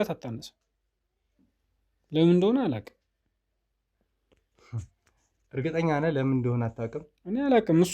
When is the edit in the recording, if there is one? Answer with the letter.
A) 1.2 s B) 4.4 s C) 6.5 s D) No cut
D